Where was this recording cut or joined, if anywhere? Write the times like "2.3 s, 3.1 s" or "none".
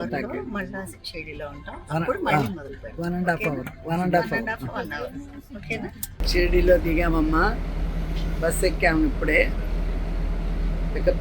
6.1 s